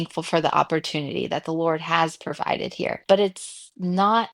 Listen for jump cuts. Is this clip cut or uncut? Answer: cut